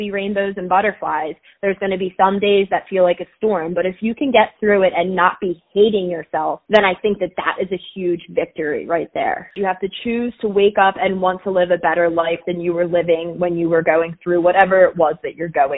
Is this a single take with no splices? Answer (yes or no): no